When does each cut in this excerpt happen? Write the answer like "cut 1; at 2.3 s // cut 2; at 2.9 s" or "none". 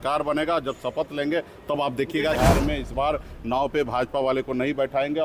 cut 1; at 2.4 s